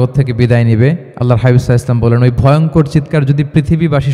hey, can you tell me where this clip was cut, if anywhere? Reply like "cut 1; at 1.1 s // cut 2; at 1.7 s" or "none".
cut 1; at 1.1 s